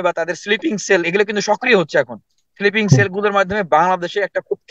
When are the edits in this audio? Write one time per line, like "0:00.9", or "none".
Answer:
none